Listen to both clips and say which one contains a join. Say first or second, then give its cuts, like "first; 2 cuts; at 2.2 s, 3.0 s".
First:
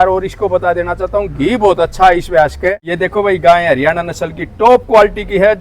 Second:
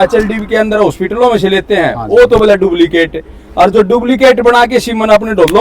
first; 1 cut; at 2.8 s